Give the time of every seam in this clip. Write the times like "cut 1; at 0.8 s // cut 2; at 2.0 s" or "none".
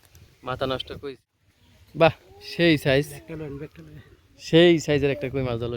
cut 1; at 1.0 s